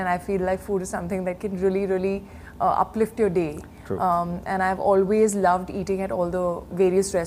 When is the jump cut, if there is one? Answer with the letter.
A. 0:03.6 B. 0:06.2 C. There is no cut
C